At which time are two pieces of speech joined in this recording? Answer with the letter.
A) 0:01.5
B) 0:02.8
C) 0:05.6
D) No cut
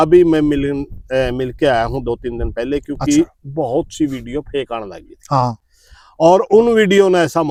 D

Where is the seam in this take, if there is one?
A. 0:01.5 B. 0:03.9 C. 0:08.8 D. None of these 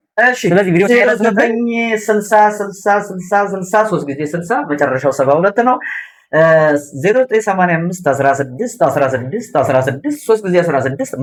D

